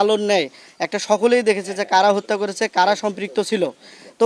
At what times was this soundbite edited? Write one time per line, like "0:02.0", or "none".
none